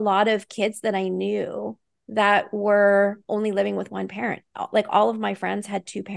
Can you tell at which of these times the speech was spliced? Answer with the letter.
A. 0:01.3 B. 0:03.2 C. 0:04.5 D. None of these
B